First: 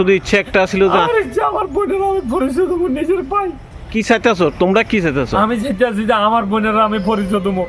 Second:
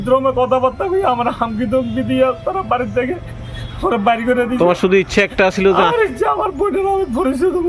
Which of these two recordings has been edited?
first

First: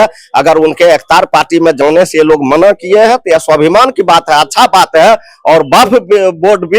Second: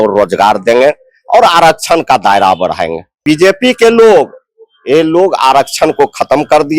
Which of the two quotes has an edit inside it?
second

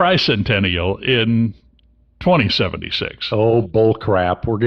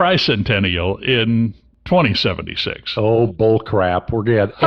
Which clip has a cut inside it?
second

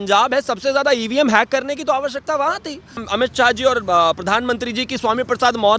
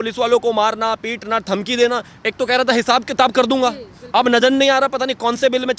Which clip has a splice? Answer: first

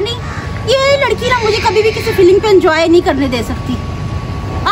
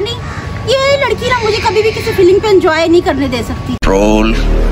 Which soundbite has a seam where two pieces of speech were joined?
first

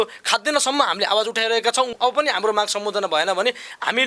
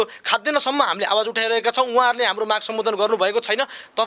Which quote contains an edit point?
first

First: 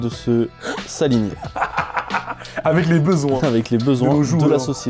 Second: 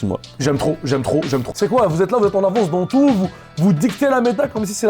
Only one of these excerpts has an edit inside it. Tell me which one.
second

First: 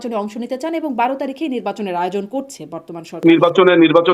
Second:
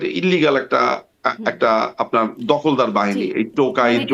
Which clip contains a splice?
first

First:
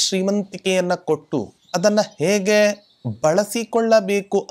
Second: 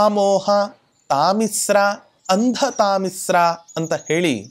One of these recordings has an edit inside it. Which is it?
first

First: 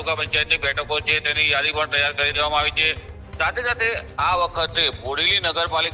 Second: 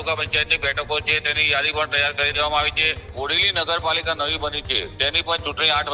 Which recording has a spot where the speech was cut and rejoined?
second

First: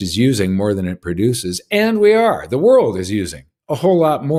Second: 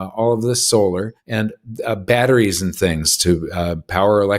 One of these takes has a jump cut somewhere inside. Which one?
second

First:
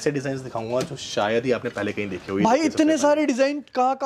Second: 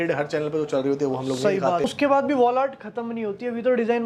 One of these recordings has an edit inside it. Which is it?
second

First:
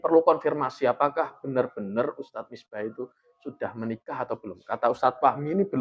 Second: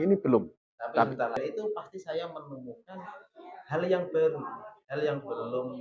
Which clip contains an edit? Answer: second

